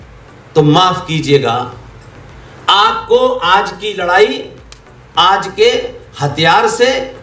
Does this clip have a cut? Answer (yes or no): no